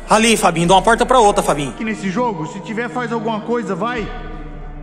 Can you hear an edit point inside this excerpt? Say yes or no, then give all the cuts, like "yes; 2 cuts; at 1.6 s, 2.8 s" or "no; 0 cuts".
yes; 1 cut; at 1.8 s